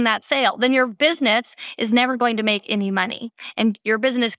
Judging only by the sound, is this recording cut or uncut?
uncut